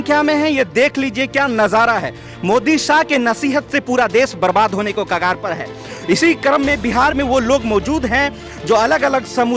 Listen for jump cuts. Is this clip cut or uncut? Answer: uncut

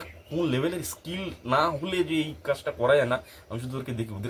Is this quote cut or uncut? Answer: uncut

